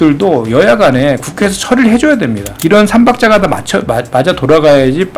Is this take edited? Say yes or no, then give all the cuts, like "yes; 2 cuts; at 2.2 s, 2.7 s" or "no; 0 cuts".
yes; 1 cut; at 2.5 s